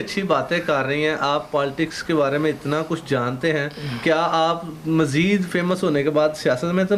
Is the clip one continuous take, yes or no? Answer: yes